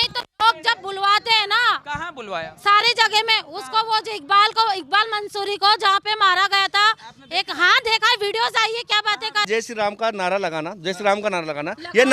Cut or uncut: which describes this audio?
cut